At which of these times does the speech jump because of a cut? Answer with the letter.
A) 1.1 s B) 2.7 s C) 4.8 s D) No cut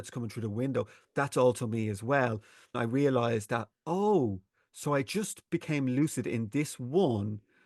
B